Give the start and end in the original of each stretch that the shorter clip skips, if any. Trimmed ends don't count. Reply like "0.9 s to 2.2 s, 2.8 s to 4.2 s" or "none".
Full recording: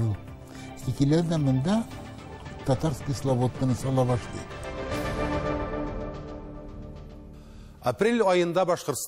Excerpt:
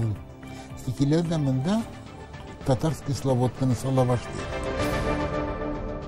4.4 s to 4.5 s

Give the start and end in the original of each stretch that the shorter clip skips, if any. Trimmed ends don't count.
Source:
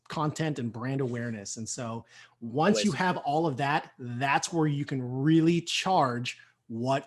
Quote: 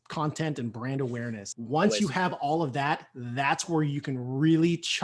1.5 s to 2.3 s

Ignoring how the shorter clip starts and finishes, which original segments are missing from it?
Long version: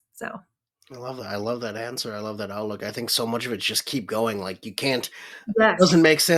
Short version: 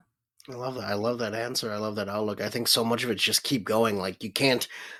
none

